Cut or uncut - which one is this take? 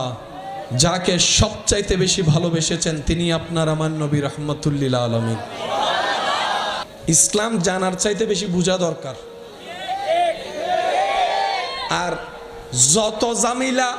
cut